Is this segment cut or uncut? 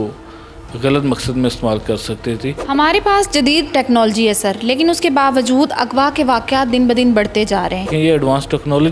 cut